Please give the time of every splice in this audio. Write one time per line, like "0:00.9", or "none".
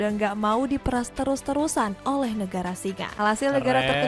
0:03.1